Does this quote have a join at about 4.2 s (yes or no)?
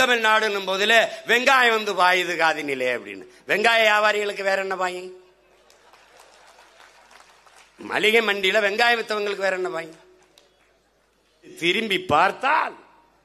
no